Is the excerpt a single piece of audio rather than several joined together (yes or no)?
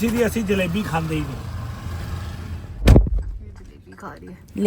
yes